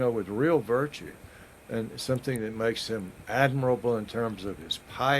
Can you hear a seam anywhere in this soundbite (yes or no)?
no